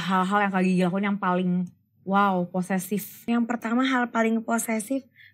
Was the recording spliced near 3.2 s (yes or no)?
yes